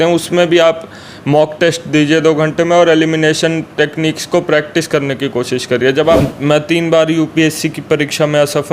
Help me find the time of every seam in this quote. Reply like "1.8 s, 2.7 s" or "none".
6.2 s

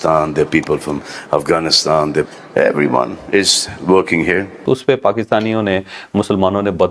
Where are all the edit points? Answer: 4.6 s

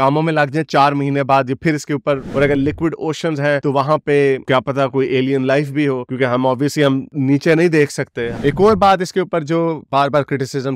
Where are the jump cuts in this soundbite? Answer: 2.3 s, 8.3 s

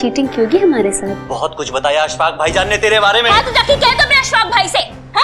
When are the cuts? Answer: 1.2 s

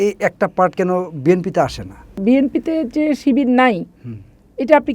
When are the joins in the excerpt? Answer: 2.2 s

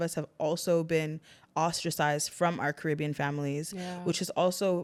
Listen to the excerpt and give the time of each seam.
none

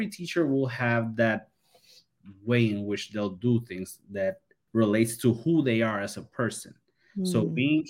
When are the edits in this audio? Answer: 4.5 s

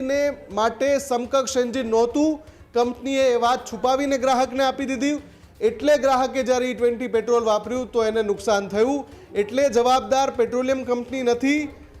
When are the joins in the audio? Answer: none

